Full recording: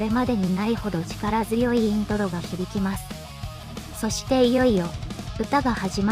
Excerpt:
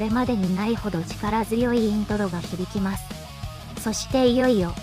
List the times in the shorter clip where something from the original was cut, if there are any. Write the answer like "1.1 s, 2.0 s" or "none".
3.6 s